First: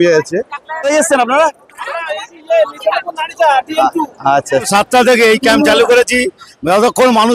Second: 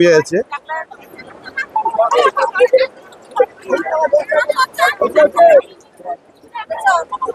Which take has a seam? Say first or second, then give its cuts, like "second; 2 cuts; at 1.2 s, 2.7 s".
first; 2 cuts; at 0.9 s, 4.7 s